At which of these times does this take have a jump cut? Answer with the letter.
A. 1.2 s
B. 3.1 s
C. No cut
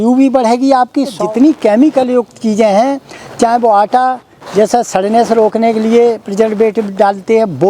A